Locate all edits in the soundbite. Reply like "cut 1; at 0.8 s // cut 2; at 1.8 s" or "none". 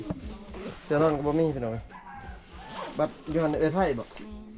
none